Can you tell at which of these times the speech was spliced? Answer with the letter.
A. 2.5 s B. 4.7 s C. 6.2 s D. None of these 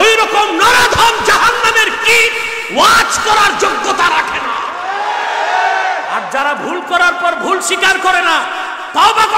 C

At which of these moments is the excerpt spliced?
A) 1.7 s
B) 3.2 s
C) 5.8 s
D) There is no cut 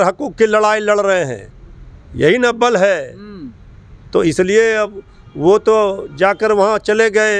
D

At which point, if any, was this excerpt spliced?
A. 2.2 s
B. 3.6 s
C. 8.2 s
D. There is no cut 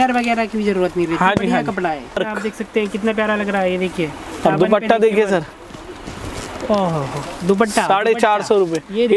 A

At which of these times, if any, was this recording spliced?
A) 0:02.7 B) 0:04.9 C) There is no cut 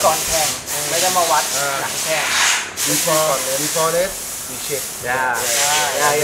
C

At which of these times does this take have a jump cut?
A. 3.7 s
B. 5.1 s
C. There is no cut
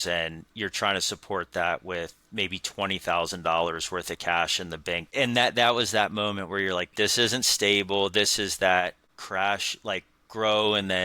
B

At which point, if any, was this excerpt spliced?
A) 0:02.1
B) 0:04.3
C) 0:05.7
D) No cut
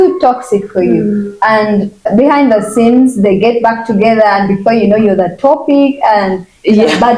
A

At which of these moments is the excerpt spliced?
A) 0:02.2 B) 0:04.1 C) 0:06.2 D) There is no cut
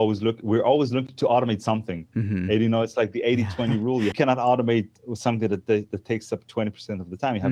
B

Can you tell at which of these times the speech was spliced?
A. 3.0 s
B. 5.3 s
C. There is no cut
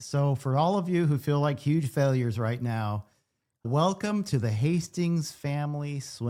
C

